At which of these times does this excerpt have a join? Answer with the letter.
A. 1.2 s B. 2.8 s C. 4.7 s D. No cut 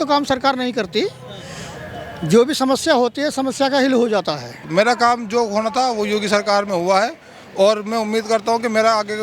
C